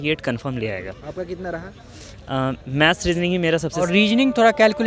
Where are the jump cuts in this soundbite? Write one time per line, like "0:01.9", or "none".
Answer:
0:03.8